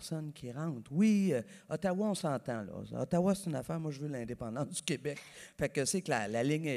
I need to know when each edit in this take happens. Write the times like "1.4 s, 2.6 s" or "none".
none